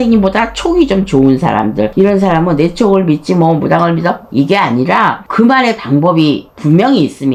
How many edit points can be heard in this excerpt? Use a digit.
0